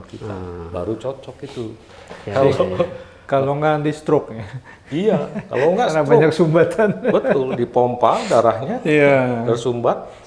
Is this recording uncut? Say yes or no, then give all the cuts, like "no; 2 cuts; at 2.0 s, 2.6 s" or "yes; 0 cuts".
yes; 0 cuts